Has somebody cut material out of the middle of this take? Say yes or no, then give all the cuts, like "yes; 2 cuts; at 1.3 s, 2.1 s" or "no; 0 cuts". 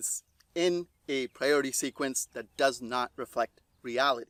no; 0 cuts